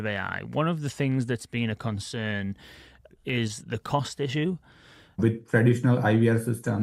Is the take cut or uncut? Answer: cut